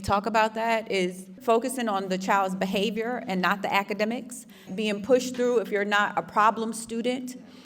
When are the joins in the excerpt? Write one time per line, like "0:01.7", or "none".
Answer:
0:01.3
0:04.7